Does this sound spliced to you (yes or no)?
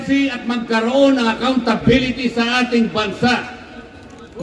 no